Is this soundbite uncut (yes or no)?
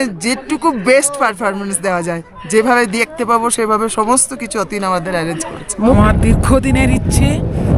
no